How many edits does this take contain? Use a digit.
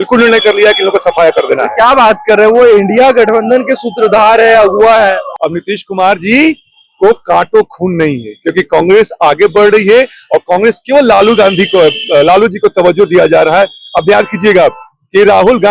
1